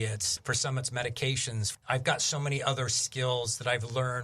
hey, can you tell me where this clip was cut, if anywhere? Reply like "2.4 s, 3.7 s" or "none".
1.8 s